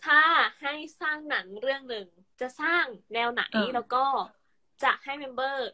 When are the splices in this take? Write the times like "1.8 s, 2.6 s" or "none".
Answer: 2.2 s